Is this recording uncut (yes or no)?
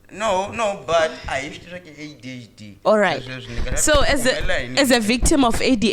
yes